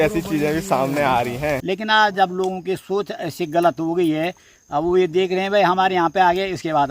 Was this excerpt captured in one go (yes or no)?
no